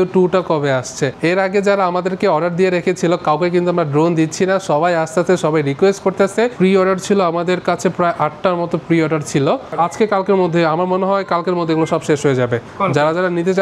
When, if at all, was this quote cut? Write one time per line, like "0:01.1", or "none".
0:01.1
0:06.5
0:09.7
0:12.7